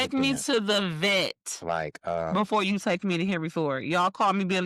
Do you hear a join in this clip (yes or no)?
no